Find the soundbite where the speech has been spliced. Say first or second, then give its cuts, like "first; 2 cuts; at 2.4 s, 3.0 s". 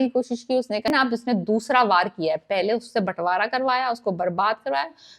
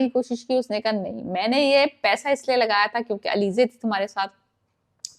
first; 1 cut; at 0.9 s